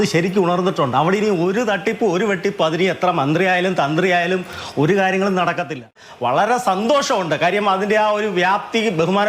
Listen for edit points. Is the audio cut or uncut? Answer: cut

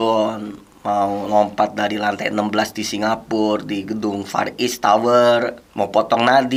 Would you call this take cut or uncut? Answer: uncut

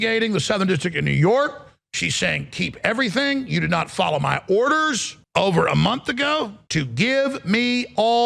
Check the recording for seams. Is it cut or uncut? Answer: cut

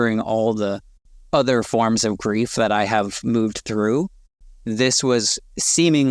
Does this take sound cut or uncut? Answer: uncut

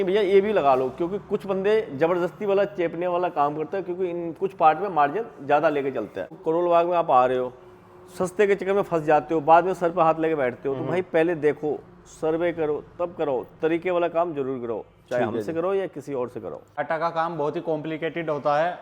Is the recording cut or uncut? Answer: cut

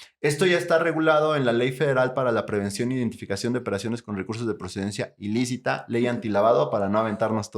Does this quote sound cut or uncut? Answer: cut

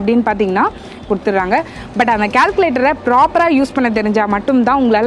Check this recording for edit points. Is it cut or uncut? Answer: cut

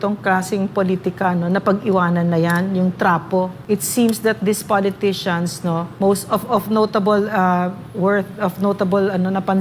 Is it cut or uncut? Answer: cut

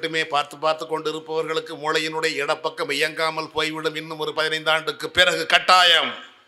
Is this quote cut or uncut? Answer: uncut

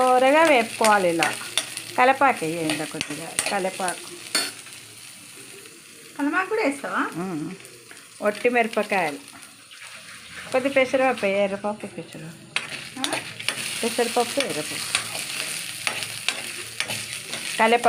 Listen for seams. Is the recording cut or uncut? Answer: uncut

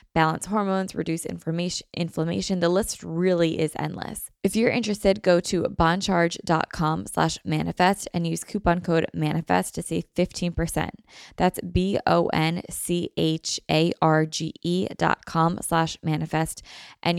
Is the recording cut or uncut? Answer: cut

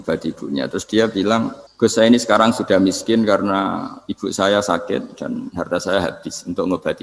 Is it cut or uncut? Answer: cut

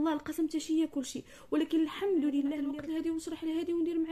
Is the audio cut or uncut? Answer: cut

